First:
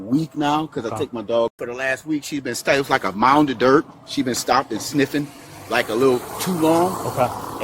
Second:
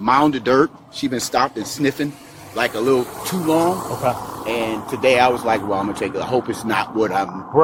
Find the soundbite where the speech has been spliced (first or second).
first